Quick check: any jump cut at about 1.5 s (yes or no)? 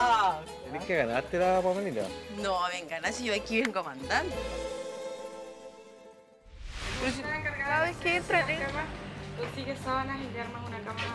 no